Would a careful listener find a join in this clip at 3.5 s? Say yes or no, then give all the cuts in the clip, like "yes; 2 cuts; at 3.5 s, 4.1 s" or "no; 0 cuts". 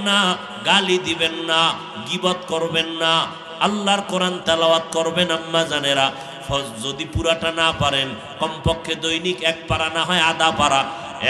yes; 1 cut; at 3.5 s